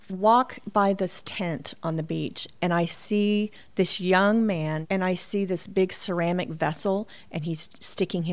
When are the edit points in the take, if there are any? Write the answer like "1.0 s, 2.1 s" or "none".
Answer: 4.8 s